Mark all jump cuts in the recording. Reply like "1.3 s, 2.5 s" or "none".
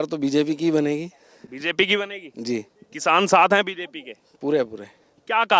none